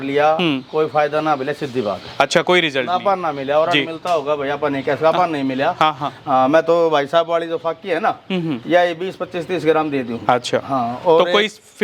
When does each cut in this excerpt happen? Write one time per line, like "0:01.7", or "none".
none